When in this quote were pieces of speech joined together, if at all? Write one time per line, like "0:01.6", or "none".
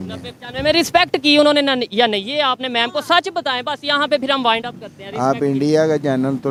none